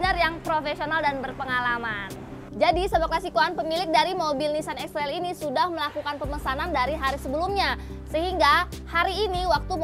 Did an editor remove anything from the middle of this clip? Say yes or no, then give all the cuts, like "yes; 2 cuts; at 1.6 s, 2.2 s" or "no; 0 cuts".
yes; 1 cut; at 2.5 s